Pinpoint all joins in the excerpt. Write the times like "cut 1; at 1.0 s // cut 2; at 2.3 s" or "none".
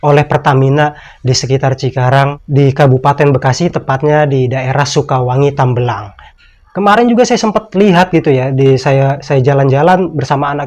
none